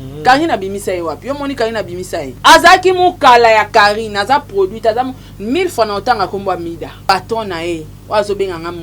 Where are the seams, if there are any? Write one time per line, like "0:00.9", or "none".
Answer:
0:02.3
0:07.1